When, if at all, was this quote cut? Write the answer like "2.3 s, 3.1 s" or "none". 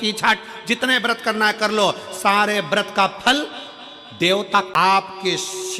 4.7 s

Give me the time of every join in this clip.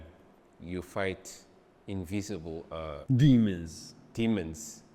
3.0 s

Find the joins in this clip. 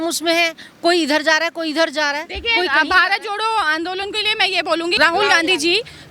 5.0 s

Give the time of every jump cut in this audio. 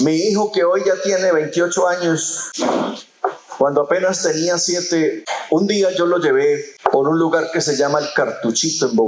2.4 s, 5.3 s, 6.7 s

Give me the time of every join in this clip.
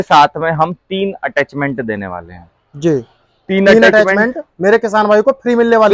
none

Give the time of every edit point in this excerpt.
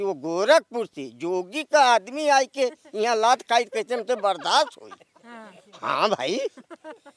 none

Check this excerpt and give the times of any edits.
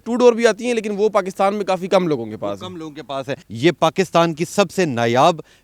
3.4 s

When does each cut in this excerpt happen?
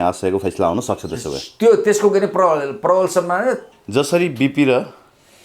3.7 s

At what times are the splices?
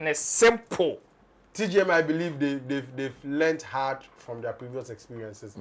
1.1 s

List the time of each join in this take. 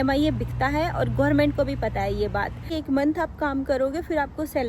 2.7 s

